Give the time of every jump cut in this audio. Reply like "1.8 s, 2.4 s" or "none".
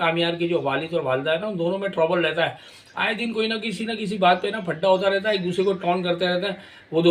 none